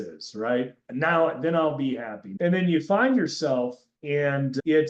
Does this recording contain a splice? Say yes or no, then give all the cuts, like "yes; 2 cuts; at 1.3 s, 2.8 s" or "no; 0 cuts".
yes; 2 cuts; at 2.2 s, 3.9 s